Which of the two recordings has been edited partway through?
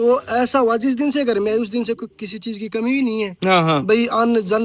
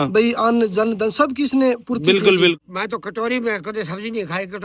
second; 1 cut; at 2.6 s

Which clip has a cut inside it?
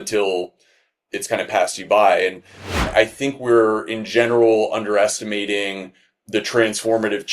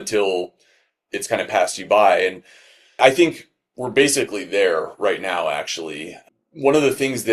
first; 1 cut; at 2.9 s

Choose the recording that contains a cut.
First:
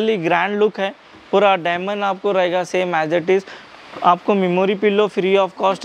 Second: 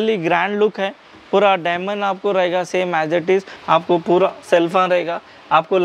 second; 1 cut; at 3.5 s

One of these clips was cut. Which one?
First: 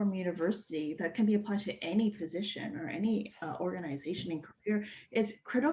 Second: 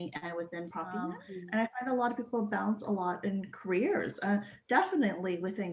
second; 1 cut; at 1.2 s

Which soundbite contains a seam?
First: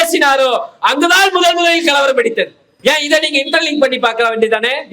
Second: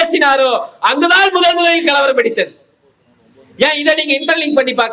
first; 1 cut; at 2.6 s

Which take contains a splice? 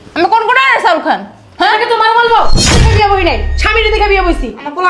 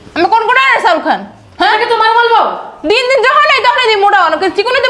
first; 1 cut; at 2.8 s

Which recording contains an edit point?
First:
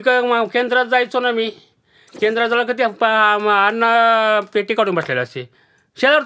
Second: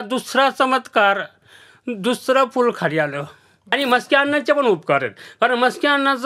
second; 1 cut; at 3.7 s

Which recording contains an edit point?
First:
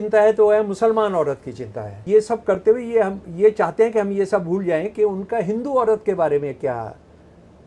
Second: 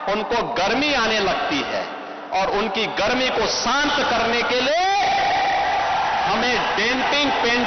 first; 1 cut; at 2.0 s

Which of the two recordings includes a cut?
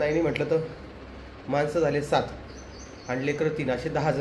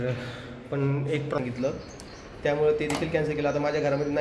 second; 1 cut; at 1.4 s

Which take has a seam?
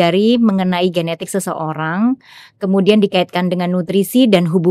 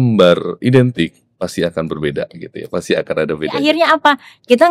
second; 1 cut; at 3.6 s

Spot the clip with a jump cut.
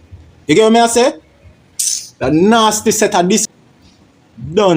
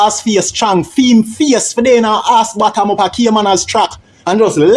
first; 1 cut; at 3.5 s

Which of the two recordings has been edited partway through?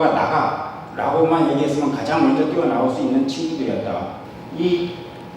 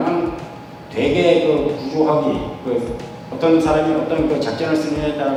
first; 1 cut; at 4.2 s

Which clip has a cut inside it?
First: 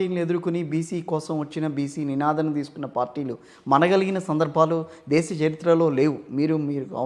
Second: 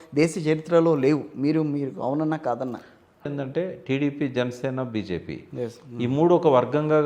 second; 1 cut; at 3.3 s

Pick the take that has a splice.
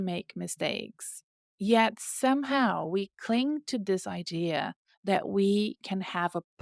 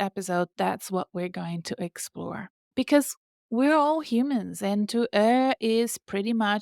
second; 1 cut; at 2.6 s

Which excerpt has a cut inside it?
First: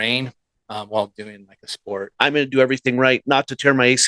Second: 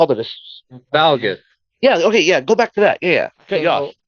first; 1 cut; at 2.1 s

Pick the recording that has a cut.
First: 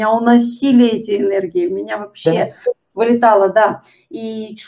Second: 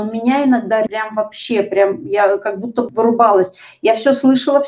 second; 2 cuts; at 0.9 s, 2.9 s

